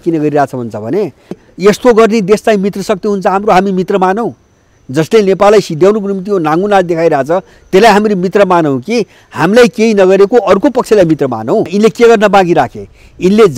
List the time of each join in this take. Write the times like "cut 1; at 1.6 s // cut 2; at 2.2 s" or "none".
cut 1; at 1.5 s // cut 2; at 11.7 s